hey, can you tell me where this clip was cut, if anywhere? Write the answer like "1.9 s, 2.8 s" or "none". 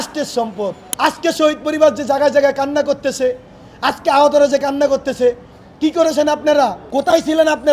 0.9 s, 6.8 s